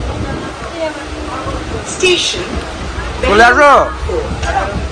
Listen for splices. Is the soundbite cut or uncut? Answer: uncut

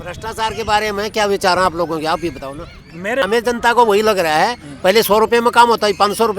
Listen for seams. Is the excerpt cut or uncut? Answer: cut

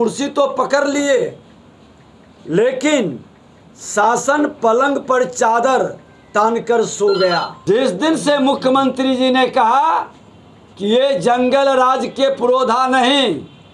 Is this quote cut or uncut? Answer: cut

